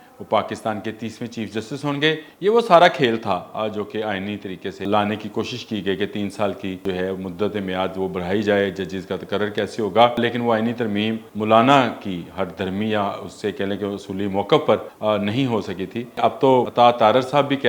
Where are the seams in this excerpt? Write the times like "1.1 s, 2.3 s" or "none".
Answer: 2.3 s, 4.8 s, 6.8 s, 10.2 s, 11.3 s, 14.9 s, 16.5 s